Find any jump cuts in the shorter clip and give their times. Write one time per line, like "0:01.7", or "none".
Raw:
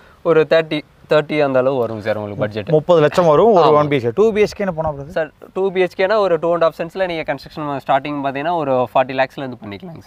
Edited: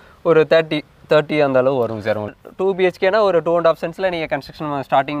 0:02.4

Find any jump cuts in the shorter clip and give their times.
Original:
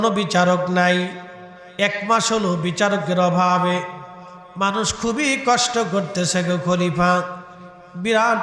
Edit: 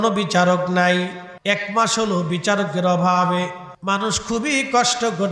0:01.3
0:03.7

